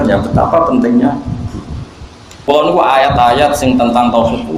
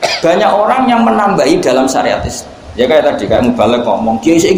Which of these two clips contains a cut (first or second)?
first